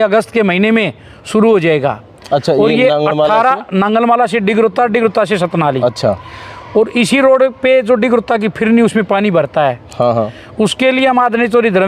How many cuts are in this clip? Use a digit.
0